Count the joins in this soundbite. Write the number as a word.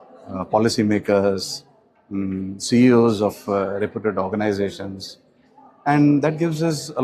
zero